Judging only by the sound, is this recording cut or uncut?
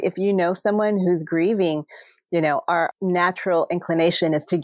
cut